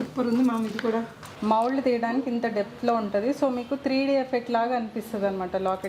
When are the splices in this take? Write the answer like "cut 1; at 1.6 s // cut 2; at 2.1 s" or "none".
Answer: cut 1; at 1.3 s